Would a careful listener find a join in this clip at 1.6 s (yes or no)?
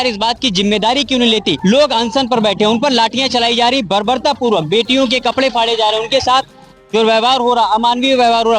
yes